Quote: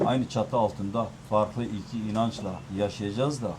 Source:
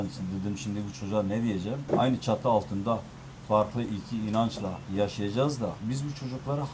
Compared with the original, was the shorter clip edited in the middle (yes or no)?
yes